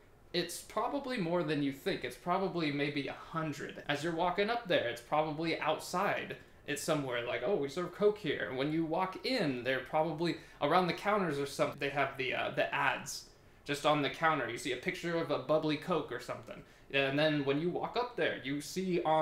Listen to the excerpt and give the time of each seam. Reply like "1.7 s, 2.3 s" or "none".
3.7 s, 11.8 s